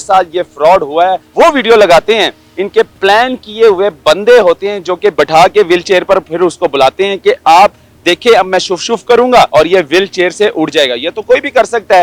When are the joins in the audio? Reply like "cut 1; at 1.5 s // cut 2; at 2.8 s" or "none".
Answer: cut 1; at 1.2 s // cut 2; at 2.5 s // cut 3; at 5.1 s // cut 4; at 9.5 s